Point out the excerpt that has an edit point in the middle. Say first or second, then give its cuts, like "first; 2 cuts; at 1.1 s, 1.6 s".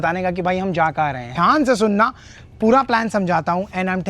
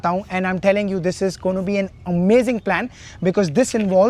first; 1 cut; at 1.3 s